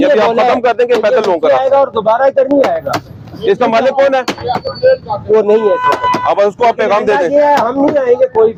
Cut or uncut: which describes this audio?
uncut